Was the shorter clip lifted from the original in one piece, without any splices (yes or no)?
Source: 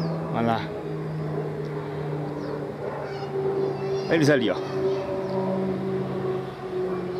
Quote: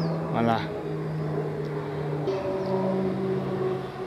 no